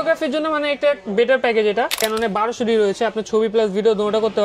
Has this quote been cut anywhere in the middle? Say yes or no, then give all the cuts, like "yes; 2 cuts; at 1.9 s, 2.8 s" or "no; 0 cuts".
yes; 1 cut; at 2.0 s